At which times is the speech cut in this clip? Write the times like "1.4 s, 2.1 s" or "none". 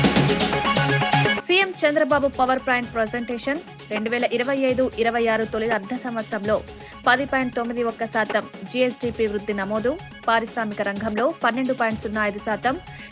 none